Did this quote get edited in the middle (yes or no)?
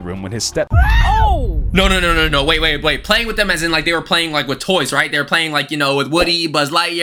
no